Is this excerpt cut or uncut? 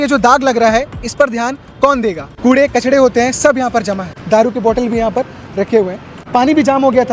cut